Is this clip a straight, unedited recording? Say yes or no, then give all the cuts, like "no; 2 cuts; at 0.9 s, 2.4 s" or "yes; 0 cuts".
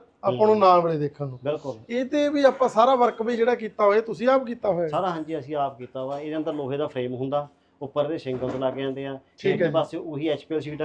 yes; 0 cuts